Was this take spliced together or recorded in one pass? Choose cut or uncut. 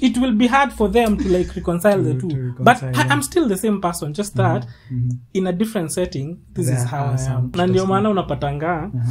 cut